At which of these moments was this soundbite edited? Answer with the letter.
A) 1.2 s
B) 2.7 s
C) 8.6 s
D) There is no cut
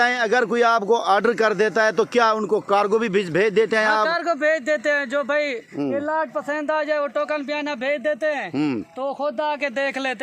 D